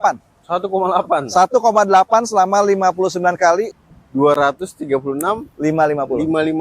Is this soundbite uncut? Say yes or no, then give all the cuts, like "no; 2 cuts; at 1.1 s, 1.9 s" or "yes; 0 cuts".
no; 1 cut; at 3.7 s